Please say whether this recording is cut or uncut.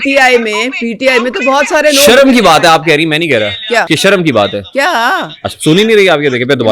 cut